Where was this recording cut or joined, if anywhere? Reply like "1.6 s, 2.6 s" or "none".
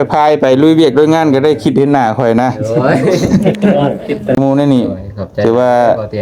4.3 s